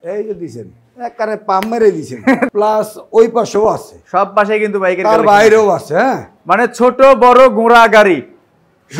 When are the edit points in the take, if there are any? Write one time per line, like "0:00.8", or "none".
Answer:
0:02.5